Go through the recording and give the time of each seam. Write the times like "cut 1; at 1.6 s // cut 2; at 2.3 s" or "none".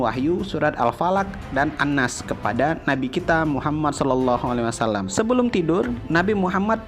cut 1; at 5.1 s